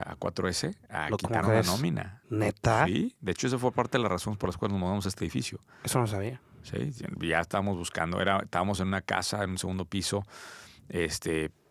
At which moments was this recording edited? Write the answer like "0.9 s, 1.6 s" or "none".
none